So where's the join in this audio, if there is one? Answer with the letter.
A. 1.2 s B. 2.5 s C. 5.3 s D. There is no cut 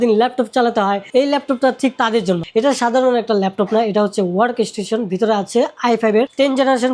B